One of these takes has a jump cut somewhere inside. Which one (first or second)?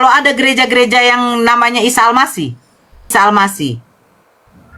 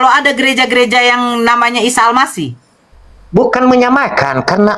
first